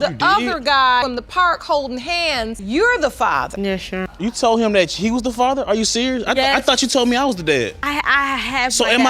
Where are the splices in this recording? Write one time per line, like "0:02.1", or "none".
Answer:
0:01.0
0:04.1